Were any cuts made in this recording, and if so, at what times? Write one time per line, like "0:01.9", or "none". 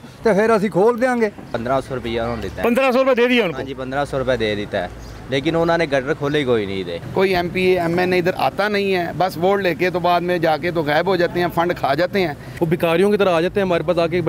0:01.4
0:06.9
0:12.5